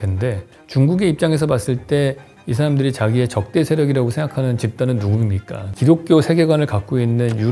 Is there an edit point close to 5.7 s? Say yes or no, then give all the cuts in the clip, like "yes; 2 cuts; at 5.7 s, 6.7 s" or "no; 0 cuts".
yes; 1 cut; at 5.7 s